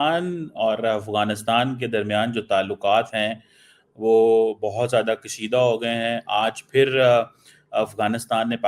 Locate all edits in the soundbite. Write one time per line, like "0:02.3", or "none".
none